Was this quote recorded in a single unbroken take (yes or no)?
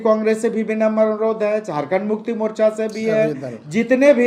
yes